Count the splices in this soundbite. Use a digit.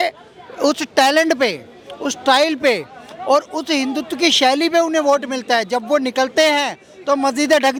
0